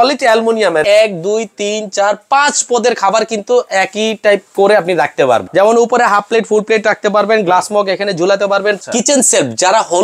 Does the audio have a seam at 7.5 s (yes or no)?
no